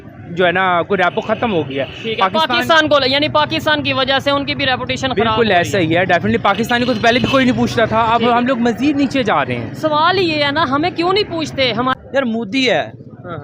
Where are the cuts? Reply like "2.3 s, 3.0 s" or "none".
11.9 s

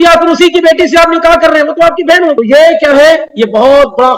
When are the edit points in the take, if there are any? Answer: 2.4 s

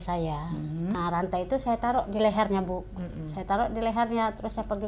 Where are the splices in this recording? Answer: 0.9 s

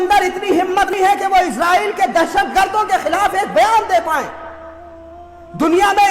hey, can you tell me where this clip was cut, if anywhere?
0.9 s

